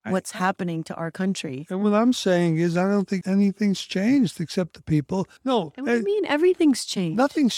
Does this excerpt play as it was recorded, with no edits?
no; 1 cut; at 5.3 s

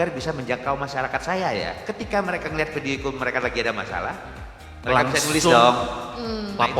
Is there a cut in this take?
yes; 1 cut; at 1.7 s

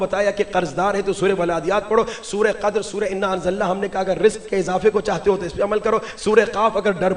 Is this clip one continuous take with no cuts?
yes; 0 cuts

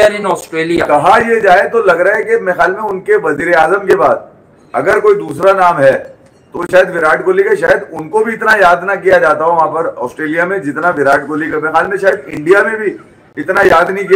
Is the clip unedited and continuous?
yes; 0 cuts

